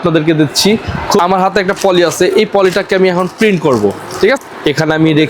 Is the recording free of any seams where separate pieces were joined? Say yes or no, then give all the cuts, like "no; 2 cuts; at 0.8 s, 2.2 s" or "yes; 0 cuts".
no; 2 cuts; at 1.2 s, 4.4 s